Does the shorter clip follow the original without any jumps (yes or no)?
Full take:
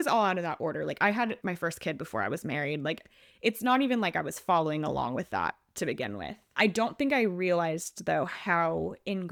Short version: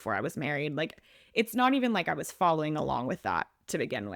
yes